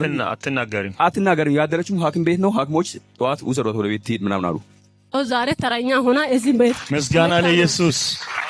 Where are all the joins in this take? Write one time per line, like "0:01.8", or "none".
0:05.1